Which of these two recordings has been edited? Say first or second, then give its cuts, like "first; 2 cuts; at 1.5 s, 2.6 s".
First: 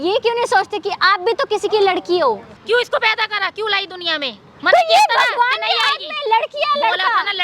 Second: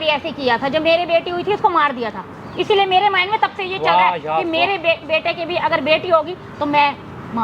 first; 1 cut; at 2.6 s